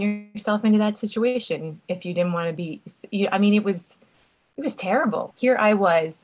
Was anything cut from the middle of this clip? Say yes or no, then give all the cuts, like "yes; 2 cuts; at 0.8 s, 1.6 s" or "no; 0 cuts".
yes; 1 cut; at 5.3 s